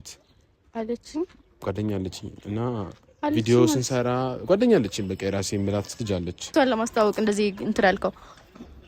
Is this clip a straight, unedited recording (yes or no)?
no